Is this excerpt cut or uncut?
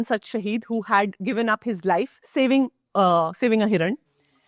uncut